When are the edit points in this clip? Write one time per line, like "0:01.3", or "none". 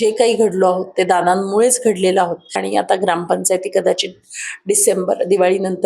0:02.6